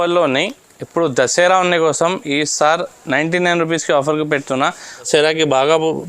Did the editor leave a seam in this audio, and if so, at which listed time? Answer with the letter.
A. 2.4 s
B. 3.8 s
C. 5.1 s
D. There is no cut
C